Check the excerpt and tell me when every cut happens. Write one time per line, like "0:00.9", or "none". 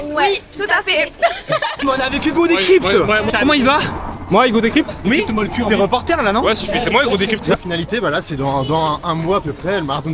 0:01.8
0:03.3
0:07.5